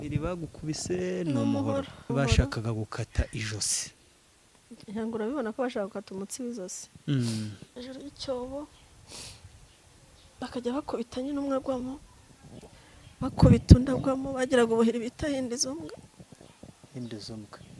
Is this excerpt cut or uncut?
cut